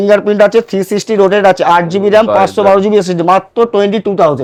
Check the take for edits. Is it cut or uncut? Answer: uncut